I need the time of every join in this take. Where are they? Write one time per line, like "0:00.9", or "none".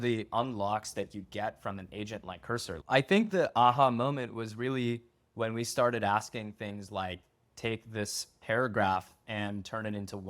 0:02.8